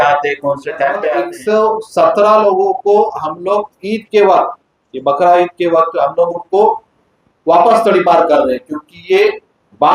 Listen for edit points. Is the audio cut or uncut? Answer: cut